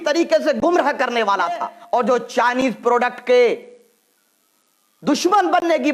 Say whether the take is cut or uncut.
cut